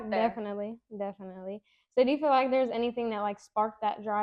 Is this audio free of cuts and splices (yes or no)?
yes